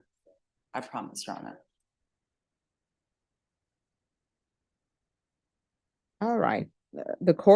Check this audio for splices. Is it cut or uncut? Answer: uncut